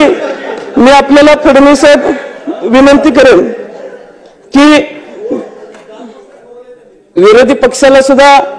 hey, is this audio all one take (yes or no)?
yes